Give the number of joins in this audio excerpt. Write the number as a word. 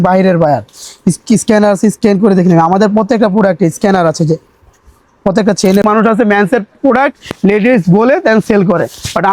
one